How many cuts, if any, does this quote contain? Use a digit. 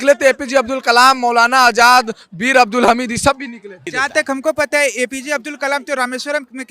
1